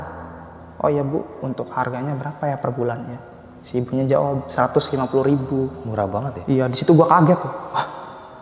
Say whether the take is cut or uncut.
uncut